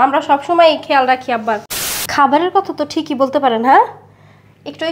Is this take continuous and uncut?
no; 1 cut; at 1.7 s

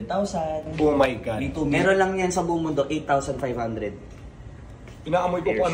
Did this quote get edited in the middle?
yes; 1 cut; at 1.7 s

